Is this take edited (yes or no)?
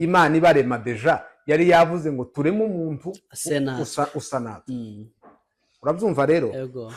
no